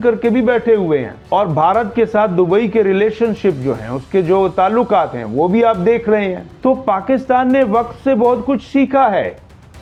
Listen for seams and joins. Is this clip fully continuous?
yes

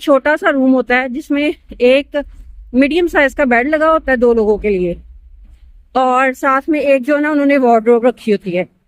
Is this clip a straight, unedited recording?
yes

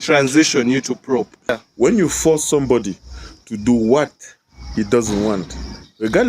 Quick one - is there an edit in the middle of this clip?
yes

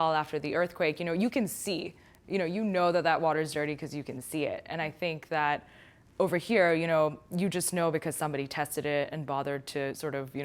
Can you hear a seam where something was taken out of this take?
no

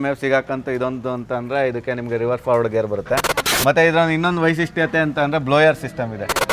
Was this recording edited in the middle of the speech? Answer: no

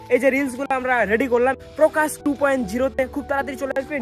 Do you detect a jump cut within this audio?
yes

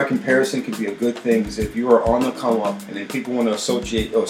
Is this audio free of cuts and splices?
yes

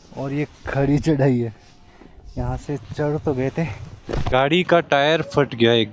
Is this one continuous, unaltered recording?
no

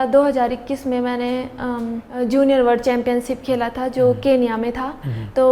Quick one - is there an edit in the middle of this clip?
no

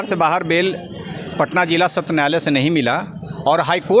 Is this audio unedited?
yes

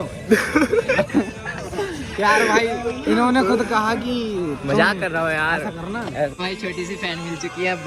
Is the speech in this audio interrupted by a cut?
yes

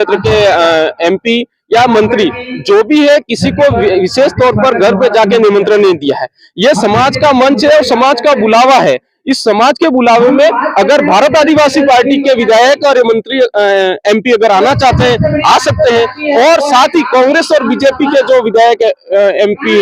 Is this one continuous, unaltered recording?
no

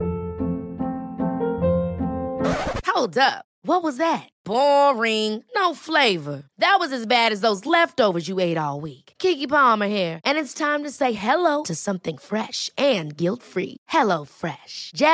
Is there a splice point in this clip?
no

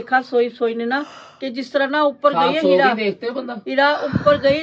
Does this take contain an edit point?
no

